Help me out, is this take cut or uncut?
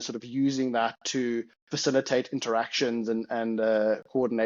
uncut